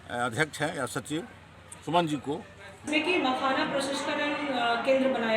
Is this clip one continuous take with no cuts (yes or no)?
no